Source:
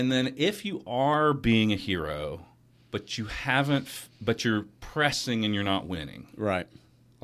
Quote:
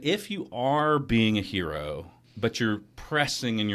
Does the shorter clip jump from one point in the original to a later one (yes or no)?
yes